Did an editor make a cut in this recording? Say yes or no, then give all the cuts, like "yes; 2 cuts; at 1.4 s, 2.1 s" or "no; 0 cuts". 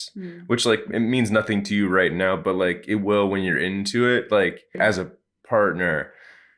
yes; 1 cut; at 4.7 s